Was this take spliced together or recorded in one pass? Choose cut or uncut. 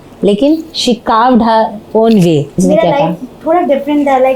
cut